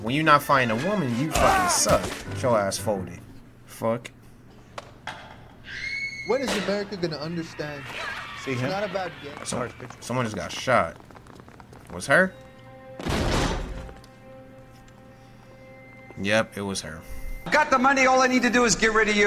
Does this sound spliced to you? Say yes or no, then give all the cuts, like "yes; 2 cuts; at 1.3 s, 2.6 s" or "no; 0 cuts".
yes; 2 cuts; at 4.3 s, 17.5 s